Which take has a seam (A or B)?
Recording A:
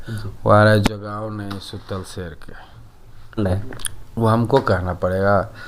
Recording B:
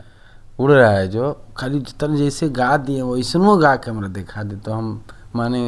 A